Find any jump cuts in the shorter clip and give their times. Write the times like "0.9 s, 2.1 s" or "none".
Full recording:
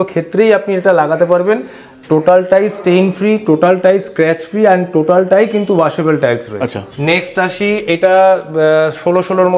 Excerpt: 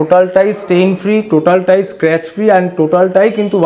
none